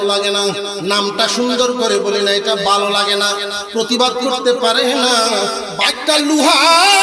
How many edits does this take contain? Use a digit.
1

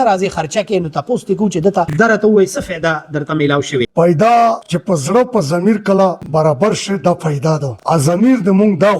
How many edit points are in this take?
1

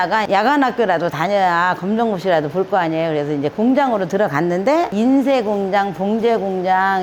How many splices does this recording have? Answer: 1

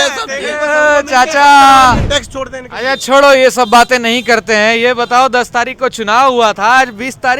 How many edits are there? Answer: 1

